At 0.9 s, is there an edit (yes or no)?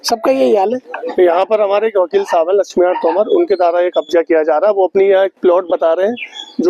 yes